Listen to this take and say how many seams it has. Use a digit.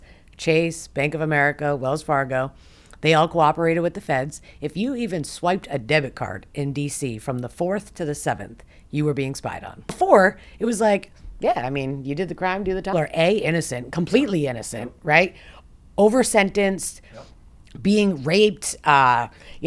2